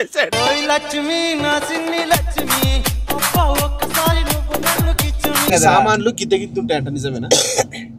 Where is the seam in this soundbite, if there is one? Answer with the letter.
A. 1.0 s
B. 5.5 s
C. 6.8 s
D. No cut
B